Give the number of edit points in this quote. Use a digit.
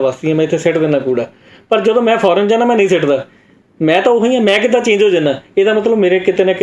0